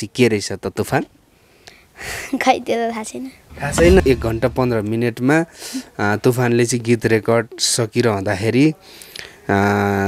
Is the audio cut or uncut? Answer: cut